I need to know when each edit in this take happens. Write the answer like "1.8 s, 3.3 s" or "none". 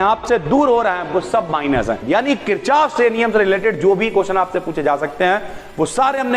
2.0 s